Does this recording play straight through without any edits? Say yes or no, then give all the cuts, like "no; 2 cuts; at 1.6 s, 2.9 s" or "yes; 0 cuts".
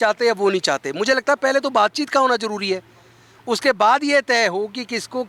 yes; 0 cuts